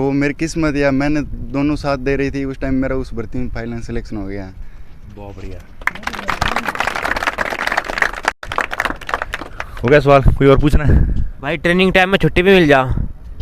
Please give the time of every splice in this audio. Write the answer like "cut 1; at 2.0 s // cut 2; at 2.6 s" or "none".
cut 1; at 8.4 s